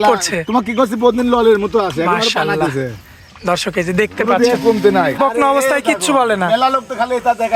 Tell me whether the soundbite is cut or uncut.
cut